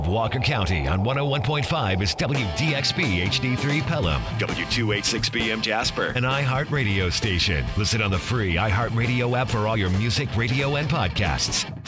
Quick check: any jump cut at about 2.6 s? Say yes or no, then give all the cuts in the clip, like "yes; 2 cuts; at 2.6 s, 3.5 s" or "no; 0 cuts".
no; 0 cuts